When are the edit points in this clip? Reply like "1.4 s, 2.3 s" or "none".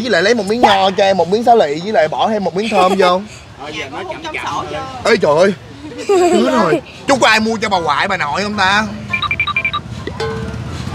6.9 s